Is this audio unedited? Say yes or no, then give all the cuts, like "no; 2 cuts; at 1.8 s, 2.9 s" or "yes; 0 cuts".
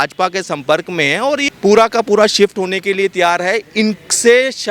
no; 1 cut; at 1.5 s